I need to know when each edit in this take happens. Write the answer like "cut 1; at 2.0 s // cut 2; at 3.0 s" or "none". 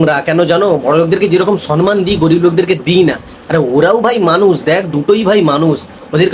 none